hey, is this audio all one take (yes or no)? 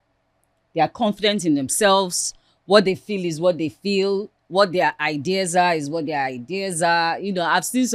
yes